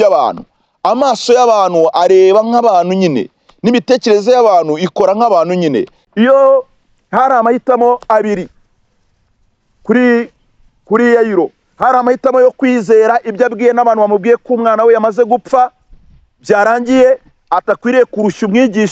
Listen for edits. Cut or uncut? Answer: cut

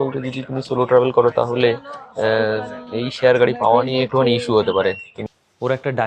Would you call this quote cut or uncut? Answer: cut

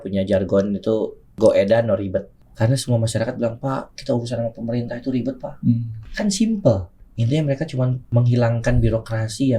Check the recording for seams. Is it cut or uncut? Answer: cut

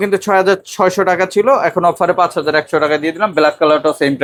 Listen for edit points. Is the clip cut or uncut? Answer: uncut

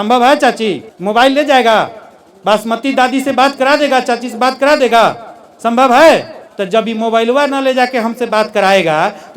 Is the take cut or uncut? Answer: uncut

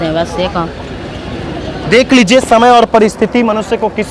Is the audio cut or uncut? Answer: uncut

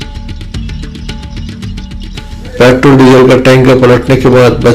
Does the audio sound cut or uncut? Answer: cut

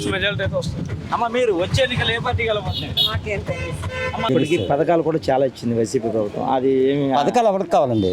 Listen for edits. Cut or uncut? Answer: cut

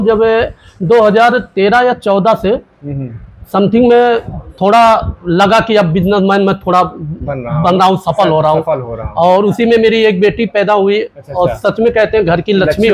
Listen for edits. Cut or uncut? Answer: uncut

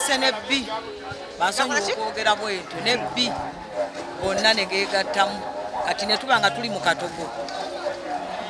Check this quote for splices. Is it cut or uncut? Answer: uncut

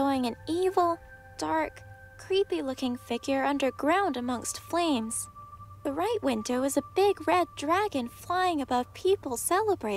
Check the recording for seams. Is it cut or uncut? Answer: uncut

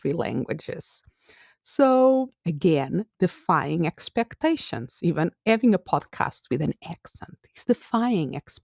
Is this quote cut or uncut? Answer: uncut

